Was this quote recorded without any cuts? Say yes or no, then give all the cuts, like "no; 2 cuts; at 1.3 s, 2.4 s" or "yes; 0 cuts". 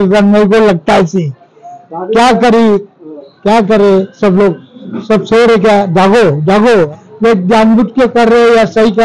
no; 1 cut; at 6.9 s